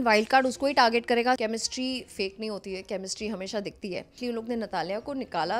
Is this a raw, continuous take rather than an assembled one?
no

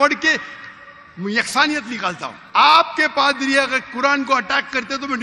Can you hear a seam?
yes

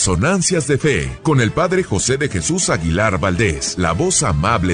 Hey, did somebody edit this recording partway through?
yes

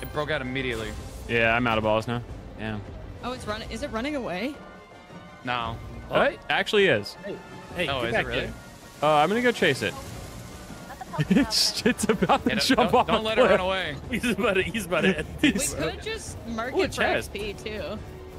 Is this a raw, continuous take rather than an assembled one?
no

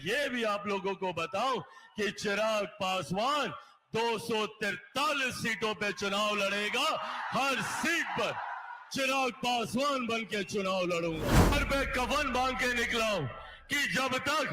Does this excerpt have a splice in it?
yes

